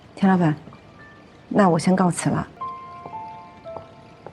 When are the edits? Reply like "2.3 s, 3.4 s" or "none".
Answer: 2.5 s